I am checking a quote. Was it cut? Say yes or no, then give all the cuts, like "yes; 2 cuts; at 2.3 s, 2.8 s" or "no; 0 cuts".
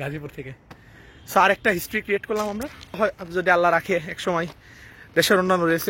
no; 0 cuts